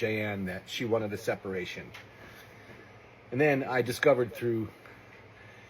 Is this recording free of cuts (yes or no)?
no